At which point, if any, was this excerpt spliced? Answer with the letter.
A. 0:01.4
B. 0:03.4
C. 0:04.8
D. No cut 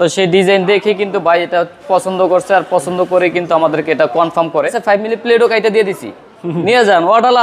C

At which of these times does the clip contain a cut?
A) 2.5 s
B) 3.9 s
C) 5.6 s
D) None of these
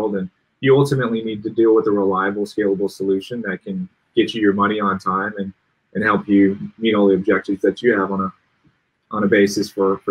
D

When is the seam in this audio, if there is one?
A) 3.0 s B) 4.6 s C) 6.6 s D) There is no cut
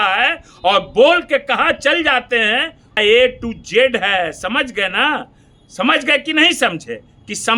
A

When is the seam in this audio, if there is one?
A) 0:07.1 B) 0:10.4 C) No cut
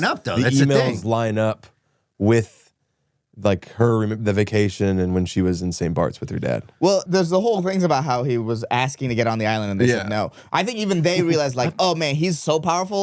A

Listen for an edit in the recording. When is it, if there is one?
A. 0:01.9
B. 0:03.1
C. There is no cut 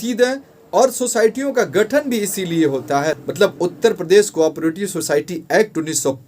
B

